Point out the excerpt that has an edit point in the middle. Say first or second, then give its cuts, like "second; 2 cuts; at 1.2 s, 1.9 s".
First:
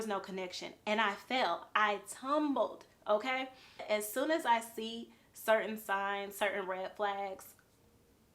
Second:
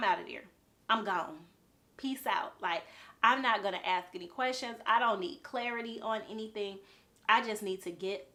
first; 1 cut; at 3.8 s